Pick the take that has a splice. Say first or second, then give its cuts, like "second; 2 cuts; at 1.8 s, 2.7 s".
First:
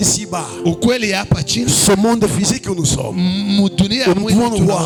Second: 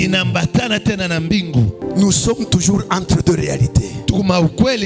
second; 1 cut; at 1.8 s